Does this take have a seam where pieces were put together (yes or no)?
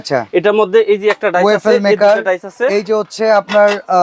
no